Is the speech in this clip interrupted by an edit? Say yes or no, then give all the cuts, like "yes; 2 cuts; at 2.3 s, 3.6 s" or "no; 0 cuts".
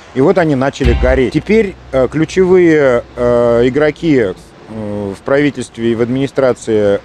yes; 1 cut; at 1.3 s